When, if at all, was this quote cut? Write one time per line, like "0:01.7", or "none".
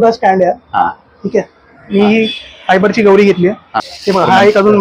0:03.8